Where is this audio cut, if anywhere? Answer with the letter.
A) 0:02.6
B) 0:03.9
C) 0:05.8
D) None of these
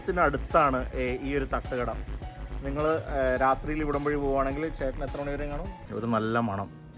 C